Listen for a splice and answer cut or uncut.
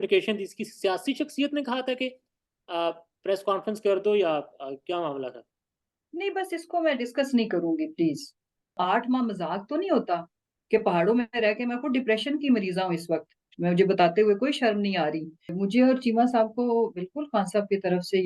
cut